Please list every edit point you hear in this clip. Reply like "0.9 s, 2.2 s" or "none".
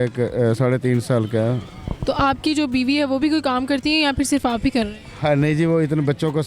none